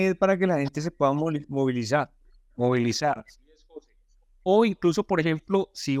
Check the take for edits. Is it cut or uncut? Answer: uncut